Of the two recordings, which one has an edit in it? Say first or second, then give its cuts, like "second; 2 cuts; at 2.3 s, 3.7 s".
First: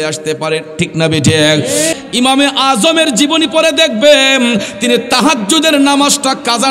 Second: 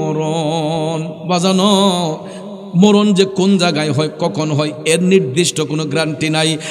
first; 1 cut; at 1.9 s